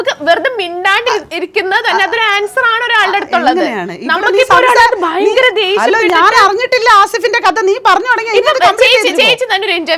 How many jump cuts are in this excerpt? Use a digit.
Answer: 0